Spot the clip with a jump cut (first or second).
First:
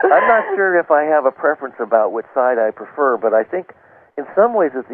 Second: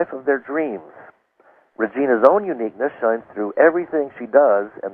first